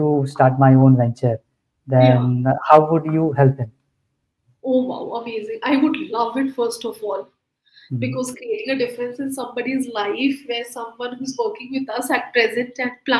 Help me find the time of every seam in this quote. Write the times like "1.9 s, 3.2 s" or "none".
none

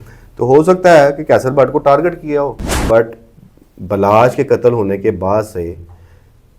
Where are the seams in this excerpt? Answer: 2.8 s

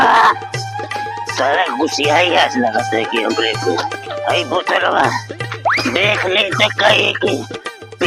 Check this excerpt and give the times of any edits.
none

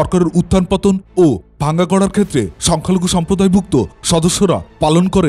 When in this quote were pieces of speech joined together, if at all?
2.6 s

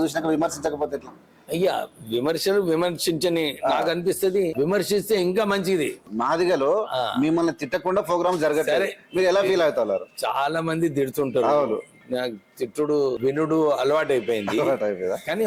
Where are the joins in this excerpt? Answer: 4.5 s, 6.1 s, 13.2 s

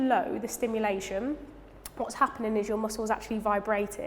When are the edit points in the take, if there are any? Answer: none

